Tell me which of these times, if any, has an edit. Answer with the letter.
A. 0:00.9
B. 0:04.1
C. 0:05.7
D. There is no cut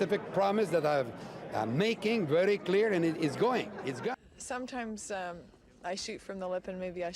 B